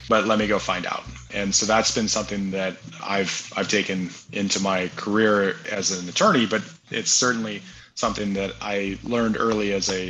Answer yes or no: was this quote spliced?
yes